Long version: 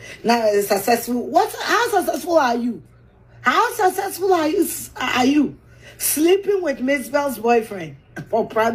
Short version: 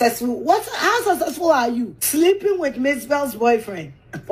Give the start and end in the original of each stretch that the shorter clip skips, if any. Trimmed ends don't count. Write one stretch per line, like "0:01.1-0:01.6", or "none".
0:02.8-0:06.0